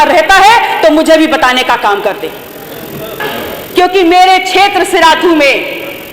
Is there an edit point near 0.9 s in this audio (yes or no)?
no